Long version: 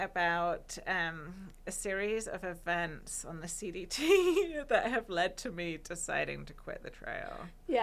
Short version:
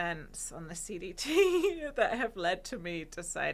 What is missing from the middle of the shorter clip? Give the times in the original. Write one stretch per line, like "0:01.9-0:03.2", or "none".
none